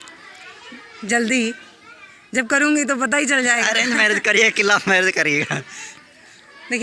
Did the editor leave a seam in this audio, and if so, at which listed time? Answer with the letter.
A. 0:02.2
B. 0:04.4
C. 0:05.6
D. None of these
D